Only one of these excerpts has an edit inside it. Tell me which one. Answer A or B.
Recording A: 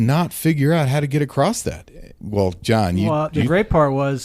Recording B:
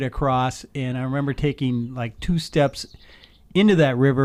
A